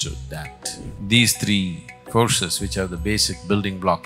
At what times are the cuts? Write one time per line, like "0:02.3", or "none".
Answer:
0:00.9